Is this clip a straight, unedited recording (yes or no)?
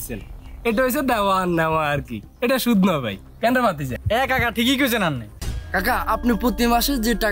no